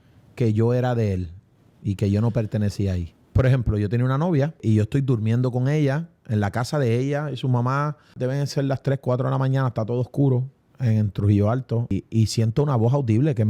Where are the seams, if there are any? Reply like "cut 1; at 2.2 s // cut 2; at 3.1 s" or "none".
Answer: cut 1; at 3.1 s // cut 2; at 4.6 s // cut 3; at 8.1 s // cut 4; at 11.9 s